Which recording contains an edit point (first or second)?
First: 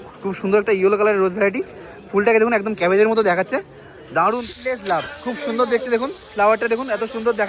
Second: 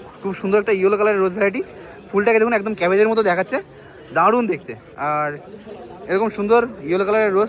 first